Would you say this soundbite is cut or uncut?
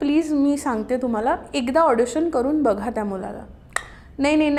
uncut